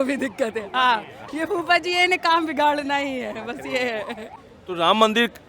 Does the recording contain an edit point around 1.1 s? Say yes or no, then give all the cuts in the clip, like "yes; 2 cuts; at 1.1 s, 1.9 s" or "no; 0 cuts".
no; 1 cut; at 4.3 s